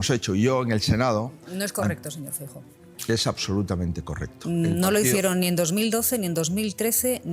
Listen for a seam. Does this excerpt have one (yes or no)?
no